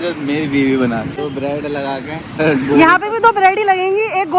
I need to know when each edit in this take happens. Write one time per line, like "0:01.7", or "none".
0:01.3
0:02.4